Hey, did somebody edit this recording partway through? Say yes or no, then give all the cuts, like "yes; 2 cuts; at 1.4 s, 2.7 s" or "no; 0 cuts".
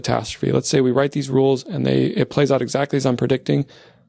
no; 0 cuts